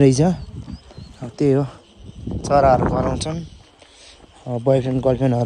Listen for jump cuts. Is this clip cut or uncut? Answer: uncut